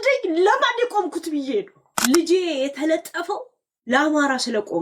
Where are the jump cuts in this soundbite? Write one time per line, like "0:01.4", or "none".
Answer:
0:01.8